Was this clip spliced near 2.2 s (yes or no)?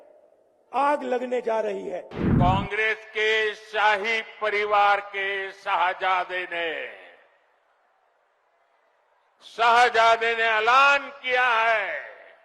yes